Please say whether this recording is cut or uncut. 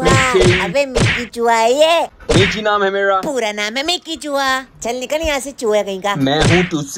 cut